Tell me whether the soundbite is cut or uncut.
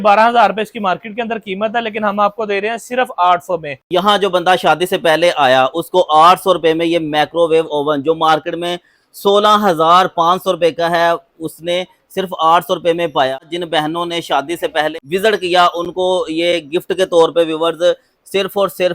cut